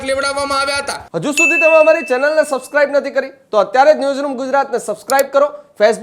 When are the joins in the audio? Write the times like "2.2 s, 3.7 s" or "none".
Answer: 1.0 s